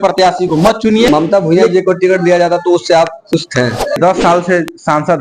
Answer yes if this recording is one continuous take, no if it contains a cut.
no